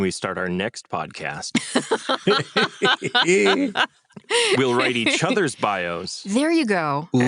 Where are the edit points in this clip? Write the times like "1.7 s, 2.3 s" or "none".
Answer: none